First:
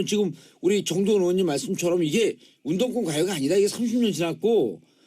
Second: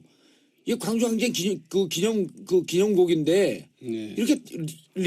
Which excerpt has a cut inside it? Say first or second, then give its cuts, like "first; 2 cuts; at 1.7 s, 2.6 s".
first; 1 cut; at 2.3 s